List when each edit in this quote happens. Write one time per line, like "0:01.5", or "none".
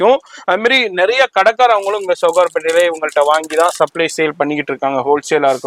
none